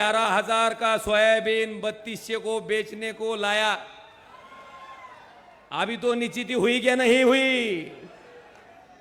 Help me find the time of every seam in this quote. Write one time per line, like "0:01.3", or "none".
none